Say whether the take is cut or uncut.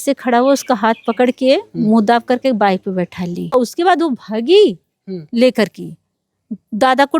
cut